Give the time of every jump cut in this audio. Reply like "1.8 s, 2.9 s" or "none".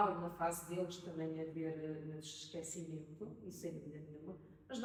none